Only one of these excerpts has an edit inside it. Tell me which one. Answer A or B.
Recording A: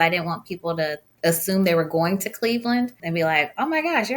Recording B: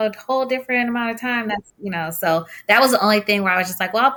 A